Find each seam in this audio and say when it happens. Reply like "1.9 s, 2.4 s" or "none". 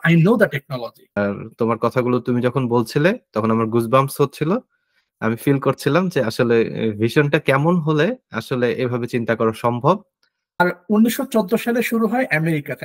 1.2 s, 10.6 s